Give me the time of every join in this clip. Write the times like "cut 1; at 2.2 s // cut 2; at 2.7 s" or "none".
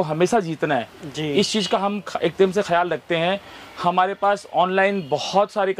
none